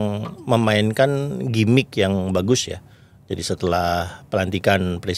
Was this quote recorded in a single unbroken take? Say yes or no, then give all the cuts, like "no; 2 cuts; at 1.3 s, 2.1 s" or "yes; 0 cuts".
yes; 0 cuts